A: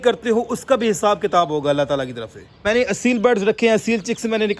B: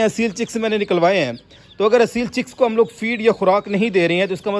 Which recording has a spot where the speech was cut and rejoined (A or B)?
A